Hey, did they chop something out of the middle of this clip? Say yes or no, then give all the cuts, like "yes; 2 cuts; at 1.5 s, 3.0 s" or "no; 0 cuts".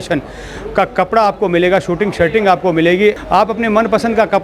yes; 1 cut; at 3.2 s